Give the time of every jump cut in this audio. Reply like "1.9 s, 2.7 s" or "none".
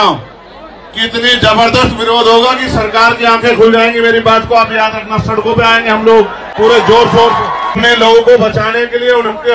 6.4 s, 7.8 s

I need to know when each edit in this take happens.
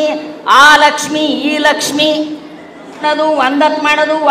3.0 s

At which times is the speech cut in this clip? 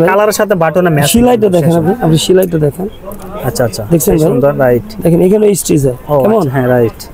none

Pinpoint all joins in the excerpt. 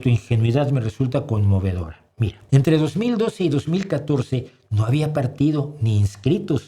2.4 s

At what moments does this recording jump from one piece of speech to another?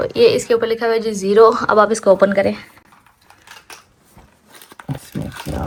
none

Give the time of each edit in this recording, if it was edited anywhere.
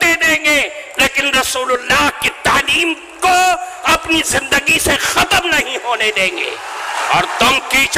7.0 s

